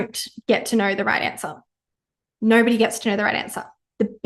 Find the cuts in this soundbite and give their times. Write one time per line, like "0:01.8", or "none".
none